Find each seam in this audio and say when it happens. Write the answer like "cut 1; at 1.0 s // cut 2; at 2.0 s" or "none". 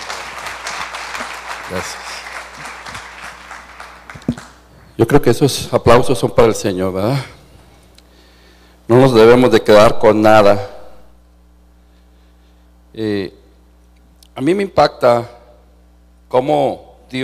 none